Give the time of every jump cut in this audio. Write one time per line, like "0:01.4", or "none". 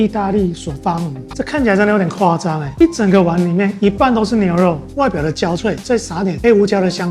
0:01.2
0:04.9